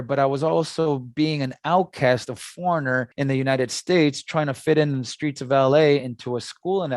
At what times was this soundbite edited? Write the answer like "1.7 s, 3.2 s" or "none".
3.1 s